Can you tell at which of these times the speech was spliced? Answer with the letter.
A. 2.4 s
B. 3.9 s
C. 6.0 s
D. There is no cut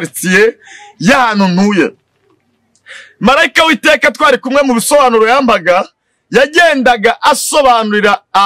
D